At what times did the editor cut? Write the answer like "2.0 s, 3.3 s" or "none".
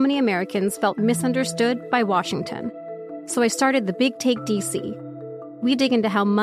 none